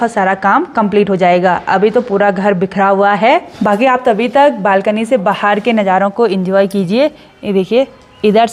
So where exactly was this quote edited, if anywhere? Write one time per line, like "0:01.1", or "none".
none